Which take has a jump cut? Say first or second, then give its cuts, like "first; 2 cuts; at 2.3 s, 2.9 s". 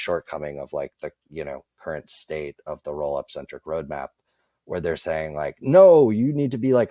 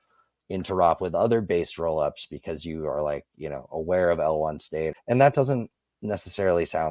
second; 1 cut; at 4.9 s